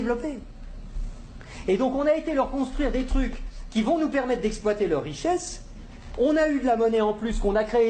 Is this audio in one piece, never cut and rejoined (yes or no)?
yes